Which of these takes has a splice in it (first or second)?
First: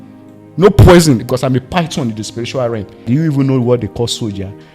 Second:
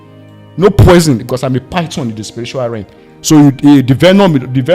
first